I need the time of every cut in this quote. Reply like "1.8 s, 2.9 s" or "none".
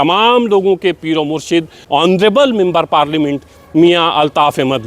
1.9 s